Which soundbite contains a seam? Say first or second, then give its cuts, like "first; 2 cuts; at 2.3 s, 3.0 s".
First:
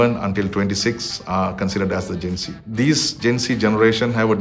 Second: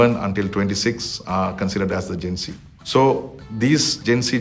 first; 1 cut; at 2.6 s